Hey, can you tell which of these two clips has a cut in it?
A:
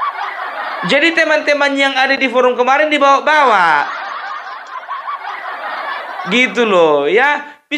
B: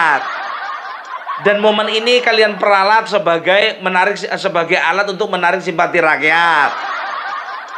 A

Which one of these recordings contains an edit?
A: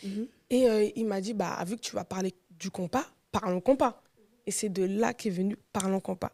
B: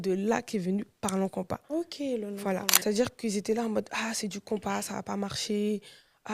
B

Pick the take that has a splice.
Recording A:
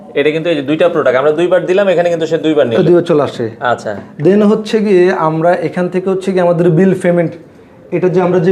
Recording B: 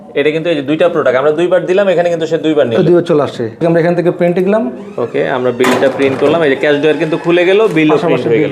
B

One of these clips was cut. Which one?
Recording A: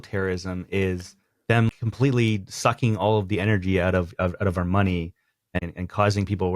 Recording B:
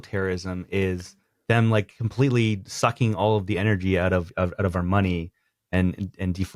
A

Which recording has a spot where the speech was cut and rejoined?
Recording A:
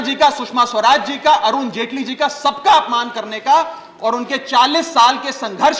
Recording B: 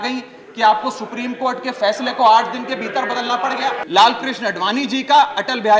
B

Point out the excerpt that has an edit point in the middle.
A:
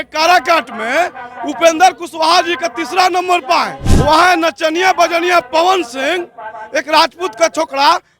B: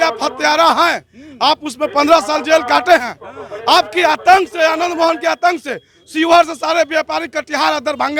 A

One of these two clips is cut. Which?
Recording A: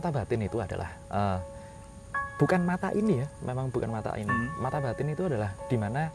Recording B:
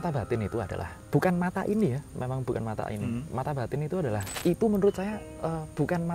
B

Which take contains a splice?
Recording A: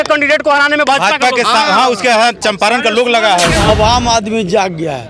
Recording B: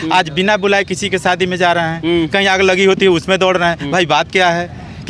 A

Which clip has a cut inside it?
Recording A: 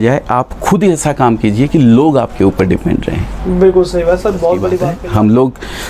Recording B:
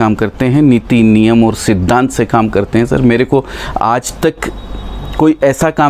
A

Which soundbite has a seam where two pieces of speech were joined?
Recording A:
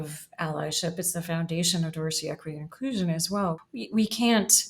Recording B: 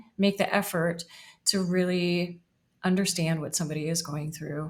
A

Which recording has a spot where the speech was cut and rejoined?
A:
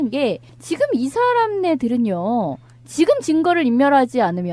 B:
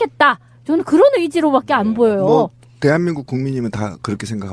B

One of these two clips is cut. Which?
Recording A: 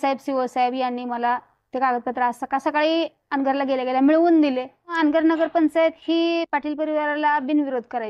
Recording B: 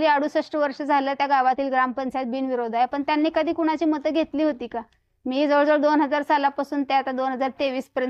A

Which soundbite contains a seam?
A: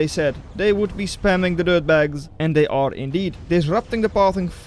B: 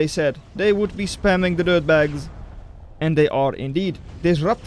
A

